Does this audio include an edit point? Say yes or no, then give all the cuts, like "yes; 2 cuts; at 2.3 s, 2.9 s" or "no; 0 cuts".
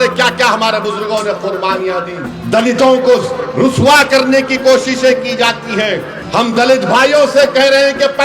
yes; 2 cuts; at 2.3 s, 6.2 s